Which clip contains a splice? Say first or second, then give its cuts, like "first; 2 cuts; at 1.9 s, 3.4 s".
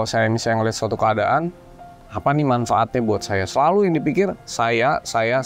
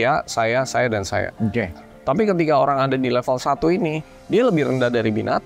second; 2 cuts; at 1.7 s, 4.1 s